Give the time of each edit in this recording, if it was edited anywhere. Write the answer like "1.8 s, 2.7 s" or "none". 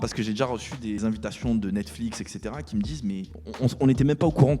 1.0 s